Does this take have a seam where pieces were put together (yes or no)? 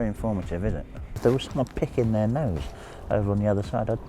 yes